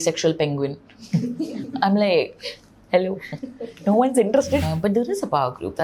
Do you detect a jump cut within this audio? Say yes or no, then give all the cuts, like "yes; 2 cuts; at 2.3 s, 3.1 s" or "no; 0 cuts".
yes; 1 cut; at 4.7 s